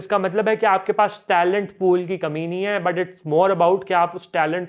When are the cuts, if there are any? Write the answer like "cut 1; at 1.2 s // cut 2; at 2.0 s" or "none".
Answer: none